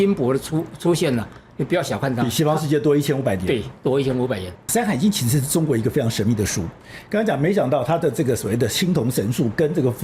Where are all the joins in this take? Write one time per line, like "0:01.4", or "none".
0:04.7